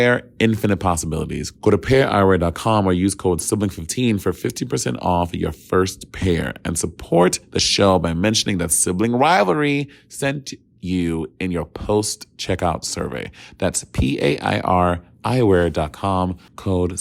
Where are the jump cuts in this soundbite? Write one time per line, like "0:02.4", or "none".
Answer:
none